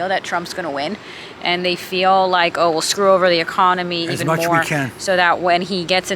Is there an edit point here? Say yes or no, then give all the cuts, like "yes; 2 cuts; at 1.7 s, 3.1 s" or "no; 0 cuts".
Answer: no; 0 cuts